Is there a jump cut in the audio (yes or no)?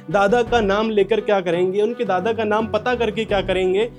no